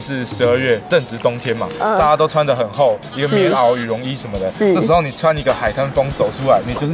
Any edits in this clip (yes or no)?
no